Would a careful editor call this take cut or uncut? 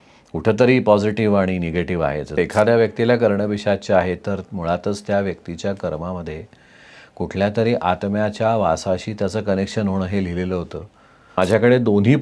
cut